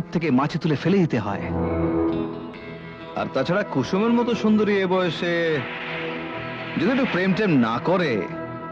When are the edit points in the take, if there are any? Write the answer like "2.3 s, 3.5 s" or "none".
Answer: none